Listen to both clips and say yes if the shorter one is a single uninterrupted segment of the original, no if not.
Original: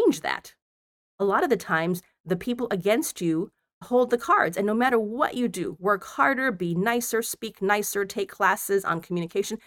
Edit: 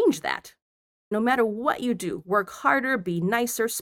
no